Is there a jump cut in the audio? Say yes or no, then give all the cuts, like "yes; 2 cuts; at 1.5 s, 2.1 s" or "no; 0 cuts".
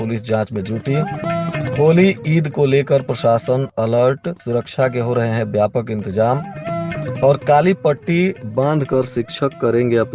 no; 0 cuts